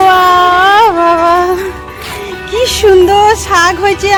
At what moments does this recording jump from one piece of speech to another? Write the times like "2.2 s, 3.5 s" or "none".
none